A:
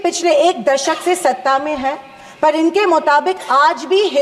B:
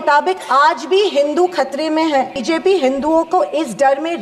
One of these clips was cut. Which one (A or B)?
B